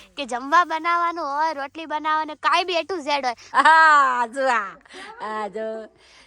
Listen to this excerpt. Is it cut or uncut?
cut